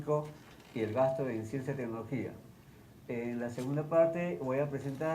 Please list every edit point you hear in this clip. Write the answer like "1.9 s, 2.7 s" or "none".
3.2 s